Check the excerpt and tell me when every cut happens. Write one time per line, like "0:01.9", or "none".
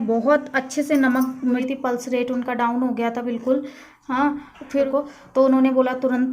0:01.6
0:04.9